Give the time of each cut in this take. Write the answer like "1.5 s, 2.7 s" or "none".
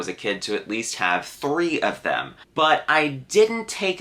2.4 s